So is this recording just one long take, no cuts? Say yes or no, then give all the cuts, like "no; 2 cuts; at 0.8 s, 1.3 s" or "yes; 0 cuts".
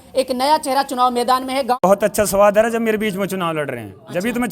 no; 1 cut; at 1.8 s